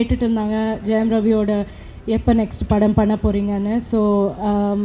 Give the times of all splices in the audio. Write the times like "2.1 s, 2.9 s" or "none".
none